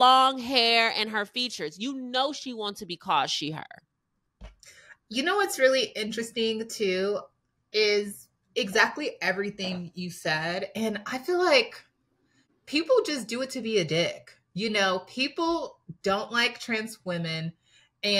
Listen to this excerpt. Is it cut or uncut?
uncut